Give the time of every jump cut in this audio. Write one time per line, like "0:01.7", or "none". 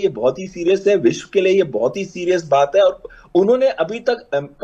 none